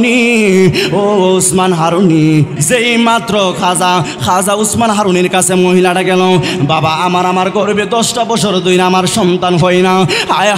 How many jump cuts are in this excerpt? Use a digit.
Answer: 1